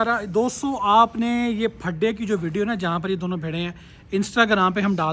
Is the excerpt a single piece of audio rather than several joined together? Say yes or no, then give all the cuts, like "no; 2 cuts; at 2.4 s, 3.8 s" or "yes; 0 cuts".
yes; 0 cuts